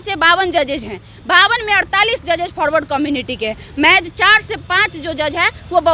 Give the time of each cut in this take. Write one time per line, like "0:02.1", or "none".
none